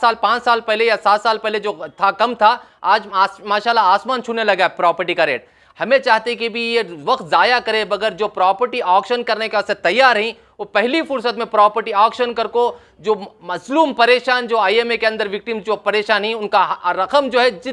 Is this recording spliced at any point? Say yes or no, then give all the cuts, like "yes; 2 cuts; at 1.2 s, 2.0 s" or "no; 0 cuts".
no; 0 cuts